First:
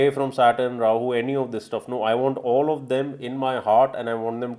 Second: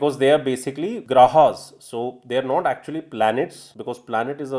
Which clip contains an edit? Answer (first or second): second